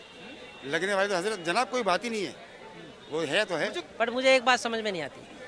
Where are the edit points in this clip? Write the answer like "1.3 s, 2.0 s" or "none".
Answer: 3.8 s